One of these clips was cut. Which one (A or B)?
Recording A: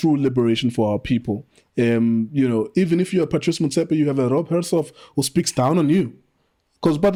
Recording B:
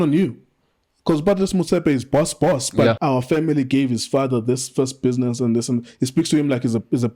B